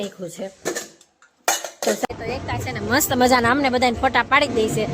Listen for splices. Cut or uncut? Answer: cut